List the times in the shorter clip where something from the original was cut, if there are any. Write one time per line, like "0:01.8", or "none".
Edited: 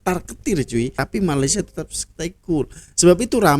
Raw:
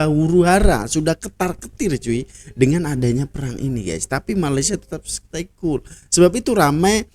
0:01.0